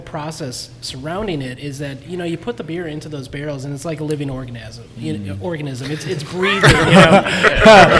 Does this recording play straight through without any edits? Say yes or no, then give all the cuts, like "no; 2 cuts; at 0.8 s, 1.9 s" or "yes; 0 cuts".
yes; 0 cuts